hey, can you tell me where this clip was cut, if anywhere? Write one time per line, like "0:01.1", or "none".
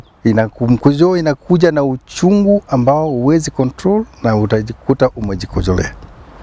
none